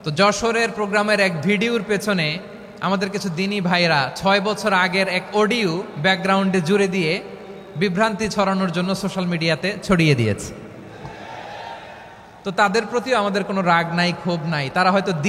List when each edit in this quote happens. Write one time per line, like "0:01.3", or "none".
none